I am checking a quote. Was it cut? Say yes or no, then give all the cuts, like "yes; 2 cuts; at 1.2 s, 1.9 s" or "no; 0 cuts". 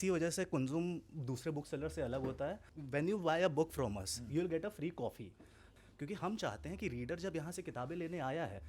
yes; 2 cuts; at 2.7 s, 5.6 s